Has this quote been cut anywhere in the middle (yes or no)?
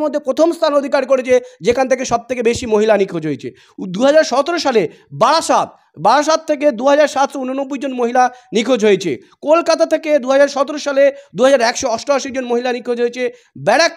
no